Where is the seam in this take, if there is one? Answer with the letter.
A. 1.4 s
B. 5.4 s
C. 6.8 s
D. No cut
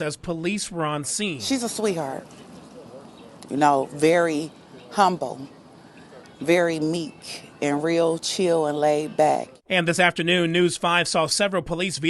A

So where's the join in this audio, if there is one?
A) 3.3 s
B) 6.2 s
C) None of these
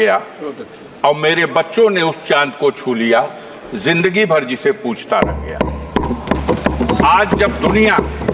C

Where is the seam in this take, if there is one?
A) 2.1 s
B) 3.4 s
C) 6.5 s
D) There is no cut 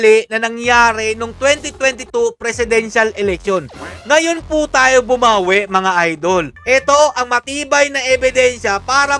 C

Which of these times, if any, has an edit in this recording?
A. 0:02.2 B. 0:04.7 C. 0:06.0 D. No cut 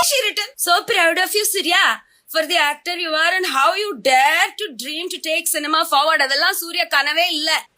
D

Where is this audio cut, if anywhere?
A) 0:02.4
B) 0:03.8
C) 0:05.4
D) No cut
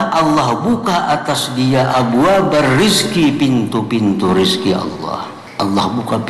C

